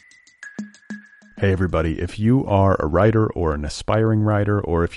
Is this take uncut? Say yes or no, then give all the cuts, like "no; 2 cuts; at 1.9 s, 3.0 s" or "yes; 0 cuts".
no; 1 cut; at 0.9 s